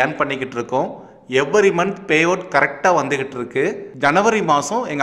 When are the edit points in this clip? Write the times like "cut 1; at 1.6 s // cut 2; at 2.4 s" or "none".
cut 1; at 3.9 s